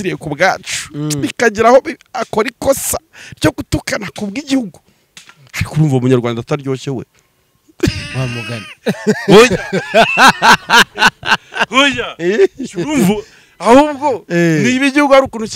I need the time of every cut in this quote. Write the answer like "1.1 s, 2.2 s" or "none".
none